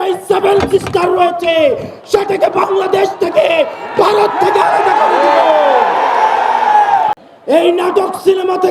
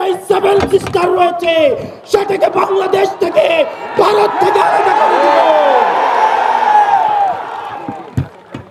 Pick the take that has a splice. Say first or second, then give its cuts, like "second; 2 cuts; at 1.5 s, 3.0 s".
first; 1 cut; at 7.1 s